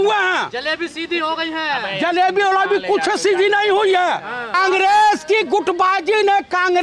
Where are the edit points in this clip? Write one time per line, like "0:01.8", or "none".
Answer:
0:04.5